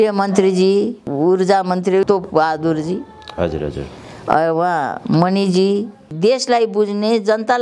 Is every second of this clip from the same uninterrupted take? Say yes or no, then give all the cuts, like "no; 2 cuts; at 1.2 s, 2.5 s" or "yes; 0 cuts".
no; 3 cuts; at 1.1 s, 2.1 s, 6.0 s